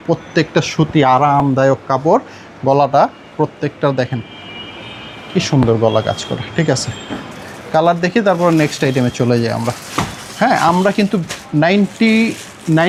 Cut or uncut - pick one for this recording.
uncut